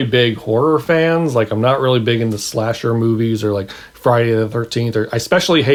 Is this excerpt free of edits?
yes; 0 cuts

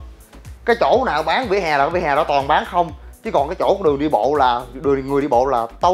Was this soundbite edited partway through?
no; 0 cuts

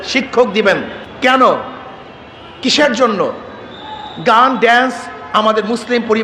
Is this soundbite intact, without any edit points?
no; 1 cut; at 1.0 s

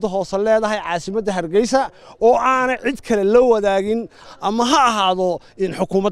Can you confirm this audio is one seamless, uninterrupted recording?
no; 1 cut; at 4.3 s

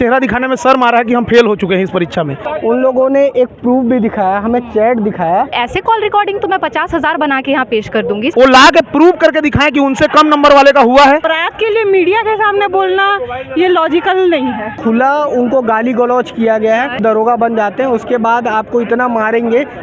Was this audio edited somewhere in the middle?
yes; 6 cuts; at 2.4 s, 5.5 s, 8.3 s, 11.4 s, 14.7 s, 17.0 s

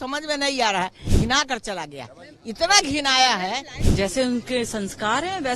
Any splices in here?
yes; 2 cuts; at 1.0 s, 3.8 s

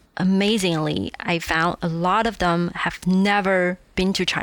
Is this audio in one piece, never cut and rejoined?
yes; 0 cuts

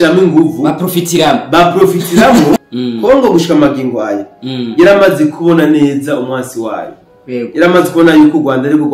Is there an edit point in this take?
yes; 1 cut; at 2.6 s

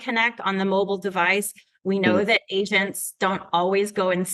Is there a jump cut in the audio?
no; 0 cuts

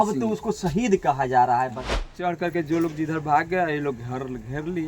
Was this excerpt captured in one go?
no; 1 cut; at 2.2 s

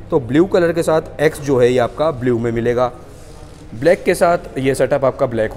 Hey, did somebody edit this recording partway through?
no; 0 cuts

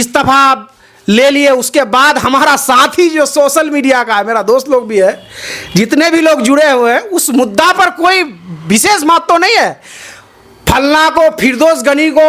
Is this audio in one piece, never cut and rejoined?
yes; 0 cuts

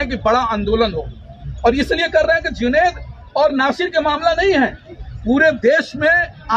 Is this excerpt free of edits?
yes; 0 cuts

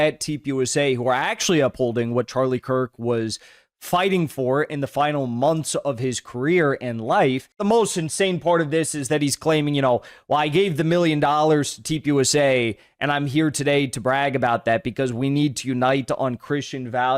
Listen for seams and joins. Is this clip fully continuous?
no; 1 cut; at 7.5 s

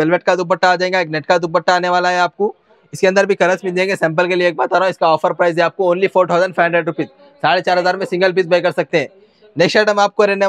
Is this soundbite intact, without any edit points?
yes; 0 cuts

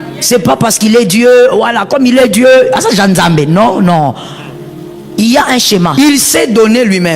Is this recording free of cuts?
no; 1 cut; at 5.9 s

